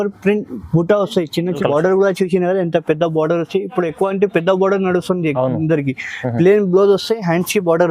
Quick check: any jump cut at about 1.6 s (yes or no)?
yes